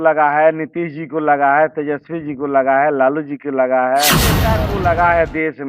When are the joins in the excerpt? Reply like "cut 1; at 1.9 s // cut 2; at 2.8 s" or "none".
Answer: cut 1; at 4.5 s